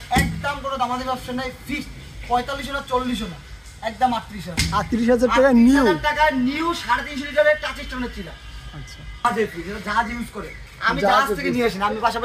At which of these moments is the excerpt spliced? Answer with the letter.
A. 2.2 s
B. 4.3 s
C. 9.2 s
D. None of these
C